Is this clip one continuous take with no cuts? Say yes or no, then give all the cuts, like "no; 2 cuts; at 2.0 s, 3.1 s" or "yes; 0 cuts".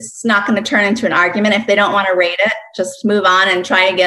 yes; 0 cuts